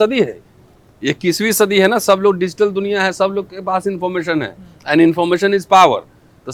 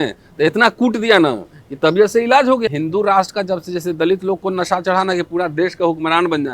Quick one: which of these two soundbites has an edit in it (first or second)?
second